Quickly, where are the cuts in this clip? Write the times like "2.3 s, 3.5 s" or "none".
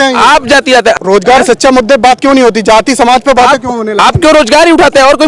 0.9 s